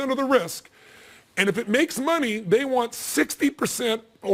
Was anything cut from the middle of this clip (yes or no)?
no